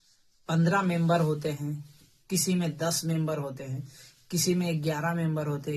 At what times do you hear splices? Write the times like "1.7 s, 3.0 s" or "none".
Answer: none